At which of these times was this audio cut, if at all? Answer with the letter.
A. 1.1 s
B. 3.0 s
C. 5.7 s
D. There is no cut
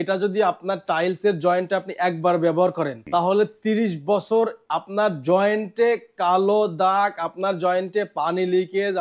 B